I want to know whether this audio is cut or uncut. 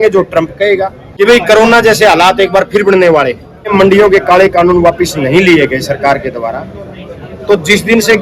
cut